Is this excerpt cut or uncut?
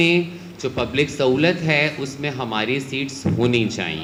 uncut